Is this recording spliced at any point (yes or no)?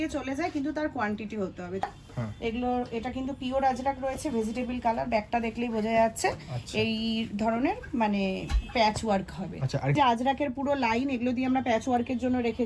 yes